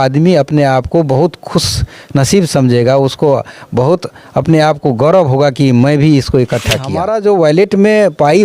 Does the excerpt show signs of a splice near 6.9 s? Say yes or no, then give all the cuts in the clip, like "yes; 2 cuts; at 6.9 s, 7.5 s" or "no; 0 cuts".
yes; 1 cut; at 6.9 s